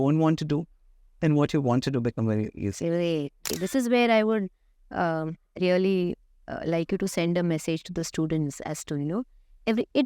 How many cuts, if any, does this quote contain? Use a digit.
1